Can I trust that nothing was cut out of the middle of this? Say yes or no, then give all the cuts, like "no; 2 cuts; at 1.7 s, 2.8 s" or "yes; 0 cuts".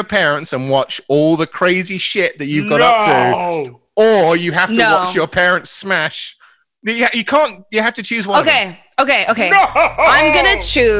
yes; 0 cuts